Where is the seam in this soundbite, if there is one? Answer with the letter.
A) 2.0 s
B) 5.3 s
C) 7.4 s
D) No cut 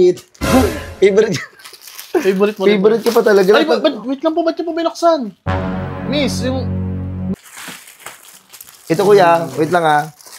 C